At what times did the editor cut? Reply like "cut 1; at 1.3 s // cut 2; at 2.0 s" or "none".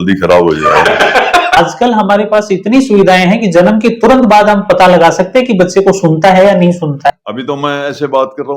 cut 1; at 1.6 s // cut 2; at 7.1 s

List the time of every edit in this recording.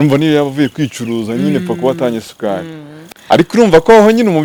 none

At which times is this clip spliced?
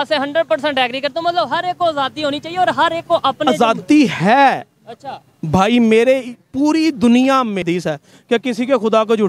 cut 1; at 7.7 s

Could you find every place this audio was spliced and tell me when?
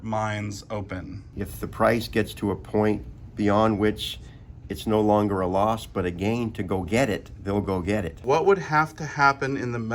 cut 1; at 1.3 s // cut 2; at 8.1 s

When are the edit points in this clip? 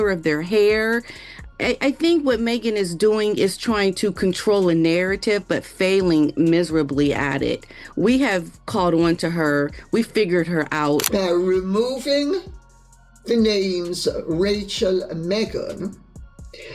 cut 1; at 11.1 s

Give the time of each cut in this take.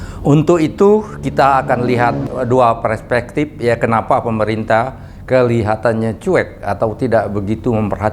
cut 1; at 2.2 s

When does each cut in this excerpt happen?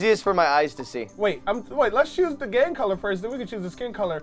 cut 1; at 1.0 s

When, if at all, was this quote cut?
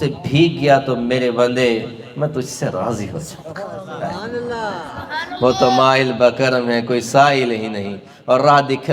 none

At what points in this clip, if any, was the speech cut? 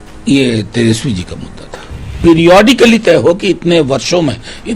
cut 1; at 2.2 s

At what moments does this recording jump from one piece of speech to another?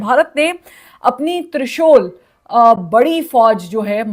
none

